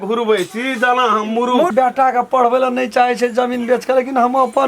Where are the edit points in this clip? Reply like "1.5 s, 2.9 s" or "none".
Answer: 1.7 s